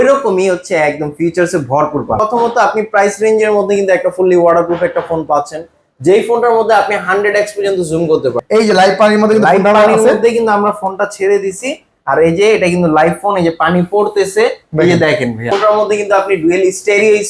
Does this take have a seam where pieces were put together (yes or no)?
yes